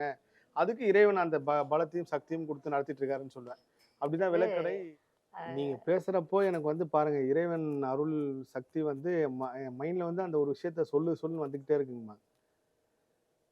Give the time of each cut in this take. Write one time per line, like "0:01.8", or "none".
0:04.6